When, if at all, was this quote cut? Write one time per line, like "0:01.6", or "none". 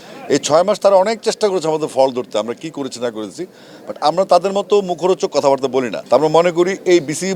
0:06.0

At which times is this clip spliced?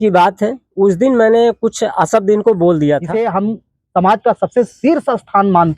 0:03.1

